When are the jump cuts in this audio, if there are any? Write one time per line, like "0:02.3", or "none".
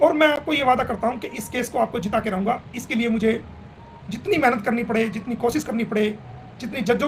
none